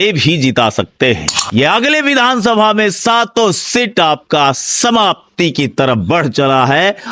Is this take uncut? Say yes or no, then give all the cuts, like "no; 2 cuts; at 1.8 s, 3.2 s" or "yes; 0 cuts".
no; 1 cut; at 1.5 s